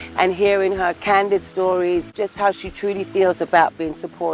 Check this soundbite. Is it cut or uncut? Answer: cut